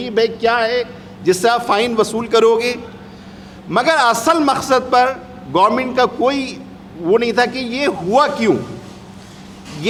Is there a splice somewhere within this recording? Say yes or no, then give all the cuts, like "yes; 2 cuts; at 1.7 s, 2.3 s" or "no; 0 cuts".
no; 0 cuts